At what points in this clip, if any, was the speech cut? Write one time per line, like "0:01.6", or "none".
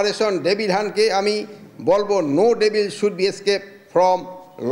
none